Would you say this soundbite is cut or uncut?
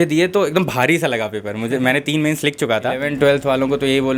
cut